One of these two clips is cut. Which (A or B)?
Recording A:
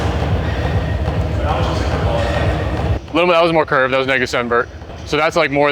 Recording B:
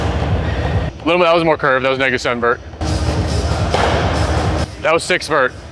B